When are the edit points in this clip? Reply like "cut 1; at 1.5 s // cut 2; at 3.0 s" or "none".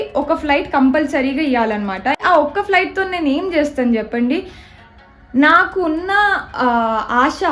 cut 1; at 2.2 s